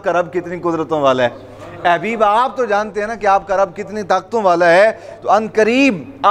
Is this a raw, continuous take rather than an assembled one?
yes; 0 cuts

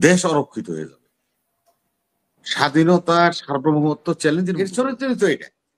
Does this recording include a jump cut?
yes; 1 cut; at 4.6 s

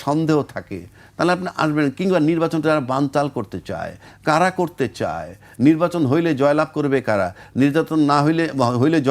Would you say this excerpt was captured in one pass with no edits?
yes; 0 cuts

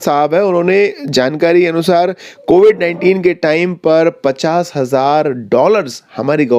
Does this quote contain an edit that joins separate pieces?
no; 0 cuts

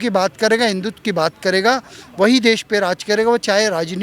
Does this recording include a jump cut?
no; 0 cuts

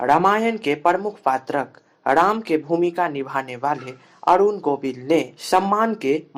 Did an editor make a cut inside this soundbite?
yes; 1 cut; at 5.4 s

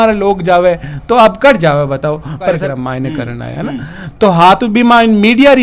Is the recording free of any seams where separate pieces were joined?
no; 1 cut; at 2.6 s

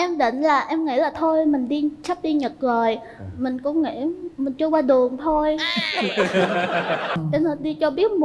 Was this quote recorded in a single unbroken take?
no; 1 cut; at 7.2 s

